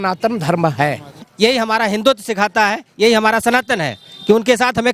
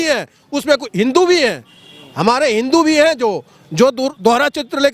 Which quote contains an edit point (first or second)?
first